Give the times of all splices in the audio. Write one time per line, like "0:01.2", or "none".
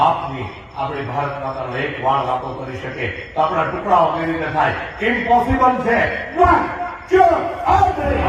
none